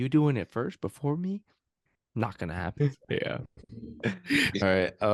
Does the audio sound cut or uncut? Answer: uncut